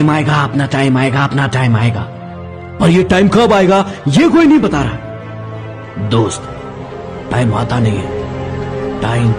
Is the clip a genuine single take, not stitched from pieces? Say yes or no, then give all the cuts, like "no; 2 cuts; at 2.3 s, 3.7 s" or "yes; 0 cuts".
yes; 0 cuts